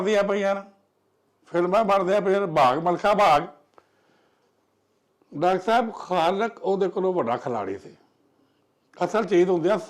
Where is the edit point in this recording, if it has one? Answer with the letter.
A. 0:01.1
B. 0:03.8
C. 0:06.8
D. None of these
D